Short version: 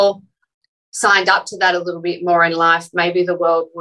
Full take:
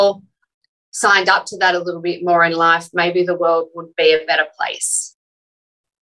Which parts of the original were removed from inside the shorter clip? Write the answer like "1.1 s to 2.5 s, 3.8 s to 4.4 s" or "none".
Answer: none